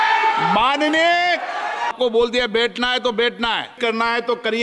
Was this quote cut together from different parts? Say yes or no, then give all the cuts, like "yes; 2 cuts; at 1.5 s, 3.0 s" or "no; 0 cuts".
yes; 2 cuts; at 1.9 s, 3.7 s